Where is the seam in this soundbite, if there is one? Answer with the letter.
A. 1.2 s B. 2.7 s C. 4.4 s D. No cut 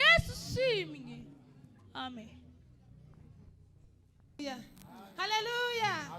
C